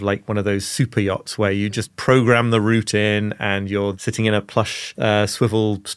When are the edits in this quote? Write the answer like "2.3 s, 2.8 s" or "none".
3.9 s, 4.9 s